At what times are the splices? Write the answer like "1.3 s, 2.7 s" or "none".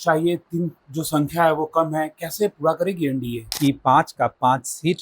3.4 s